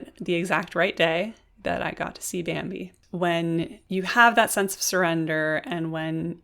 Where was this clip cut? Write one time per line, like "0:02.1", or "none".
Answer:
0:03.0
0:03.8